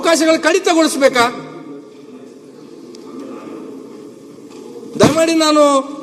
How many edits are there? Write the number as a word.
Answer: zero